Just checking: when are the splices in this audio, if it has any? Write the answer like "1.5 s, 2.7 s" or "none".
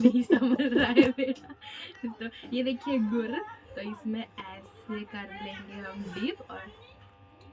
none